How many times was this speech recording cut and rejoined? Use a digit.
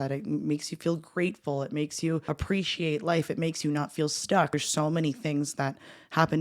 2